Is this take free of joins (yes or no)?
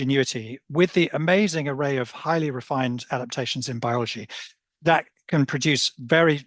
yes